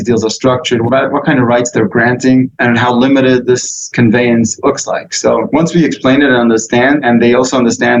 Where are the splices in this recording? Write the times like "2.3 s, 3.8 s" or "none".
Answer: 0.8 s, 2.5 s, 3.4 s, 4.5 s, 5.5 s, 7.0 s